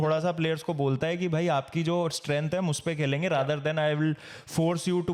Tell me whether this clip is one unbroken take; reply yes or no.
yes